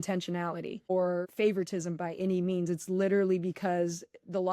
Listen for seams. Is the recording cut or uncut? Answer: cut